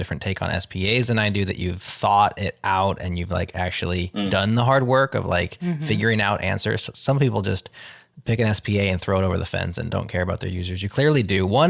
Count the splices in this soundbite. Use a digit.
0